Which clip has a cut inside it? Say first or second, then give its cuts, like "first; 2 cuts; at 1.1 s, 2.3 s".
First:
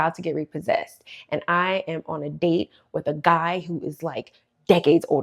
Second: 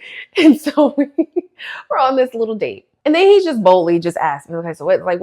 second; 1 cut; at 2.9 s